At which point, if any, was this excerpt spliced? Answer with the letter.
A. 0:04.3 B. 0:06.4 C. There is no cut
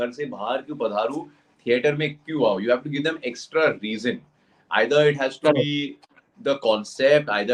C